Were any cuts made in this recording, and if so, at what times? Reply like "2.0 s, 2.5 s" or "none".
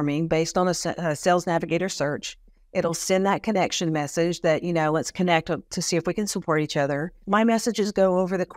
7.2 s

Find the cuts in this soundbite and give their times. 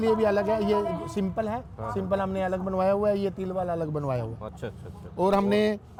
none

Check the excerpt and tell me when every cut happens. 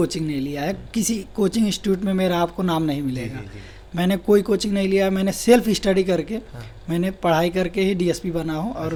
none

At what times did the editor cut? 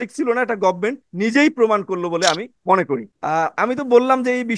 1.1 s, 2.5 s

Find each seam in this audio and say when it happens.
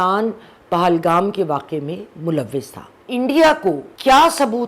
3.0 s

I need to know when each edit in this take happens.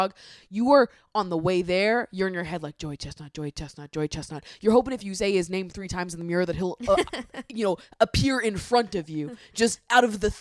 none

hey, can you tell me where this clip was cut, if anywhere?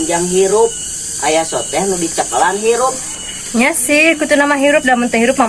3.1 s

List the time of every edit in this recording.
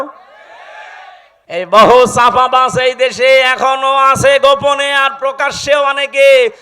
1.3 s

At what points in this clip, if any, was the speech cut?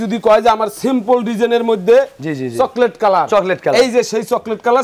none

